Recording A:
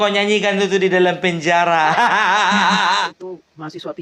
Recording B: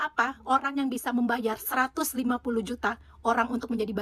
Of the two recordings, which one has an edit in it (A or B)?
A